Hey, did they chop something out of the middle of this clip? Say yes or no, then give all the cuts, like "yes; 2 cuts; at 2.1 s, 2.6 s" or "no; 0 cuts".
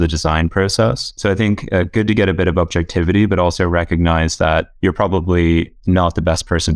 yes; 2 cuts; at 1.1 s, 4.7 s